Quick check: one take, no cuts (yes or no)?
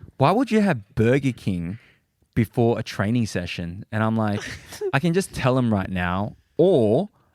no